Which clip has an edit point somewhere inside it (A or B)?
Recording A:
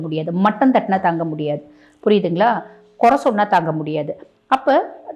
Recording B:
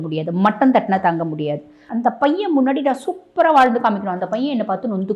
B